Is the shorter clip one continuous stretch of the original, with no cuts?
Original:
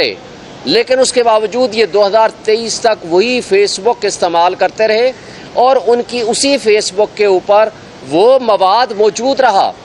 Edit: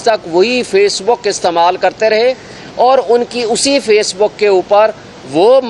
yes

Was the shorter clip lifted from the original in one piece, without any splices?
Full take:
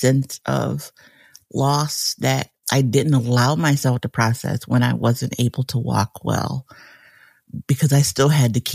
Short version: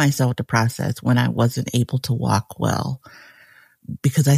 yes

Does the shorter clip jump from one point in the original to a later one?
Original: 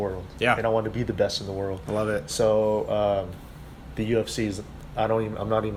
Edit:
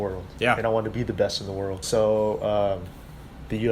yes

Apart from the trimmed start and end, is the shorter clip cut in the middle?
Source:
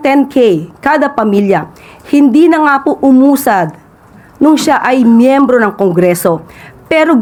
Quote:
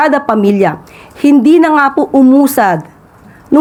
no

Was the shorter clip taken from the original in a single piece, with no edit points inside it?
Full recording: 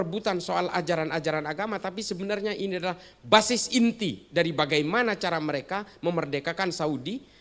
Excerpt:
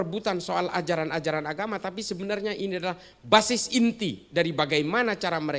yes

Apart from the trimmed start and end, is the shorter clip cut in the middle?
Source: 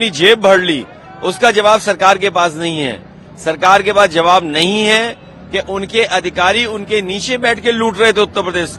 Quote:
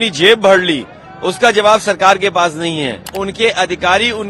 yes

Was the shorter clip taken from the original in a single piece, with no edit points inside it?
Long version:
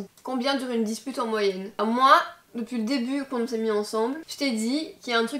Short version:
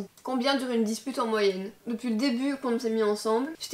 no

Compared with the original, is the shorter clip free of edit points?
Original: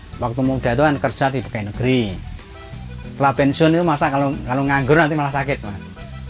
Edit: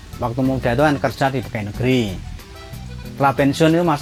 yes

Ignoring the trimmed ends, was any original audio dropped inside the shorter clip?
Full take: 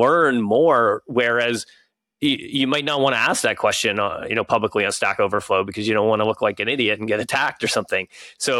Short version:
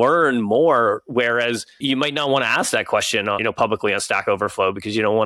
yes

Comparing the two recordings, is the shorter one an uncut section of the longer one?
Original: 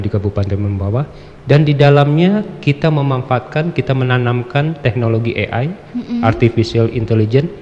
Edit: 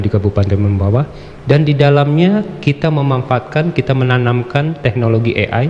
yes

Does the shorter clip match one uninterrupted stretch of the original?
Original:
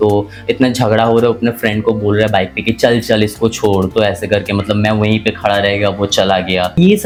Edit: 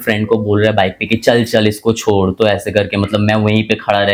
yes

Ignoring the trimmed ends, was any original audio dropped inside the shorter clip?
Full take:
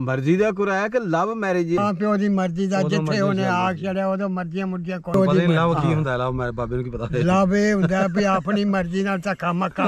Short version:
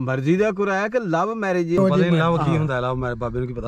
yes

